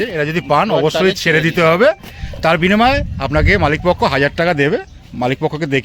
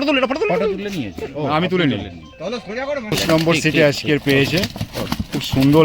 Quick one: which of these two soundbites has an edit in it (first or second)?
second